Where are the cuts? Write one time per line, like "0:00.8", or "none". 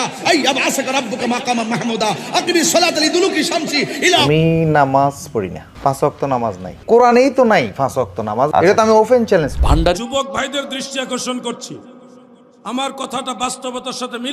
0:04.2
0:10.0